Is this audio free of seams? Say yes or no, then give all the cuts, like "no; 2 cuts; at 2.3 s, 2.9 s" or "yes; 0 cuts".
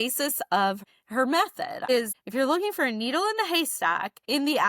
no; 2 cuts; at 0.9 s, 1.9 s